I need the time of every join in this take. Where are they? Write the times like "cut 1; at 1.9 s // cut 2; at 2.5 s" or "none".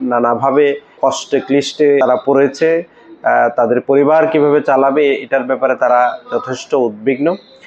cut 1; at 1.0 s // cut 2; at 2.0 s